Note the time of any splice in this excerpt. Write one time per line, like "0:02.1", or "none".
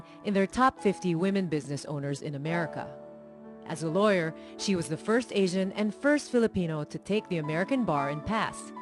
none